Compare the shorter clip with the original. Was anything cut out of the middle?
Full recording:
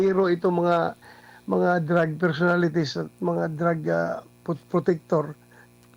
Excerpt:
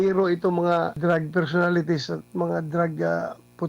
yes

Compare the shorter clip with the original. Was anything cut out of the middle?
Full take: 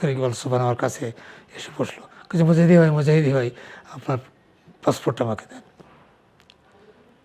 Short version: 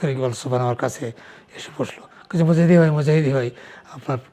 no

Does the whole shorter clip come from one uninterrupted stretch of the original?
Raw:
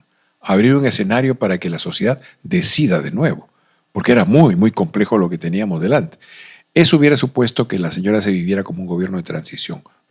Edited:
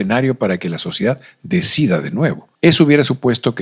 no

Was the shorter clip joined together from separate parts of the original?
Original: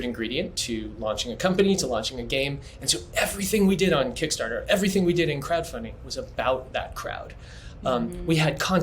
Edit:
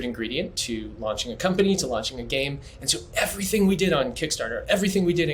no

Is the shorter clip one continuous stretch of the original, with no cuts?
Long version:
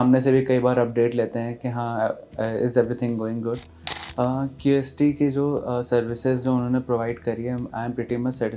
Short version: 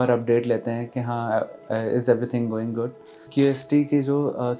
no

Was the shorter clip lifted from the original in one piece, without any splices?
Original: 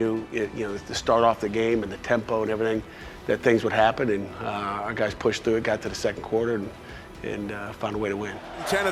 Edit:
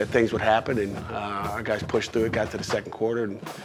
yes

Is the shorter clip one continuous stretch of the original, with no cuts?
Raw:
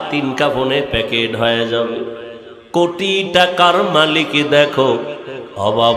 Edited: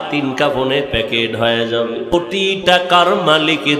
no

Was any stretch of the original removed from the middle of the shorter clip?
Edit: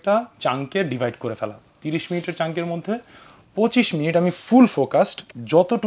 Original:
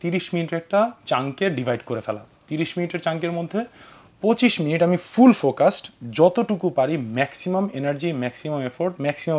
no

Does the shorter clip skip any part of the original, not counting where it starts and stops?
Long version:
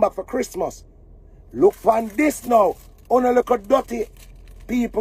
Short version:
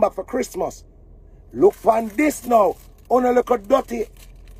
no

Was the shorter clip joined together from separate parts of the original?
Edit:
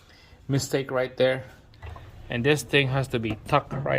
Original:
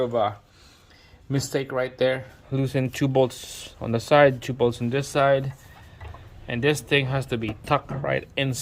yes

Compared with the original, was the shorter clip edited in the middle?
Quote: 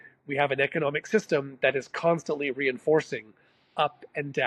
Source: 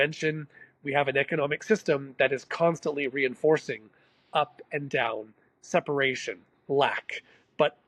no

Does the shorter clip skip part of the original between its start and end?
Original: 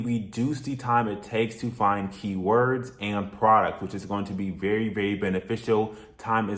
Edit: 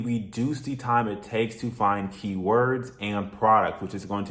no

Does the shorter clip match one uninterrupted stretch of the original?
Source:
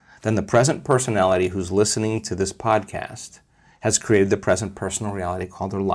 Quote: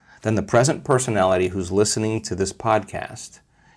yes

